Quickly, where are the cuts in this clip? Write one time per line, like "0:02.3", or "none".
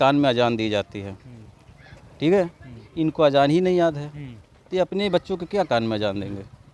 none